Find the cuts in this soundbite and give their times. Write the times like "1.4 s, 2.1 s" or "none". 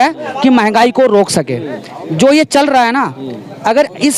none